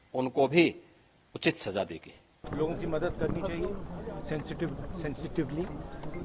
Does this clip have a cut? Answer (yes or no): yes